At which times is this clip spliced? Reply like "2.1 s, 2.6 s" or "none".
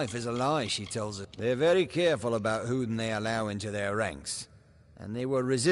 1.2 s